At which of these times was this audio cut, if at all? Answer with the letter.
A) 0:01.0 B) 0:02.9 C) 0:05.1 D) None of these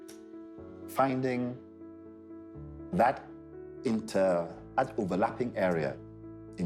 A